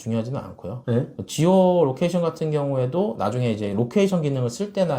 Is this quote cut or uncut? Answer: uncut